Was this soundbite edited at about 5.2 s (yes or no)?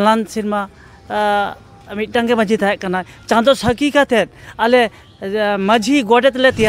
no